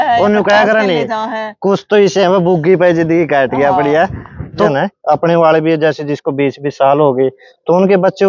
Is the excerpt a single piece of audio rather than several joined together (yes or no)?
no